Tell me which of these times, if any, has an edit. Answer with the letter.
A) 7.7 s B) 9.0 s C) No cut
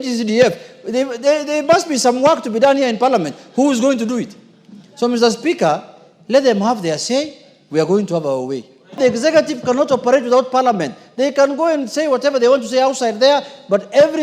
B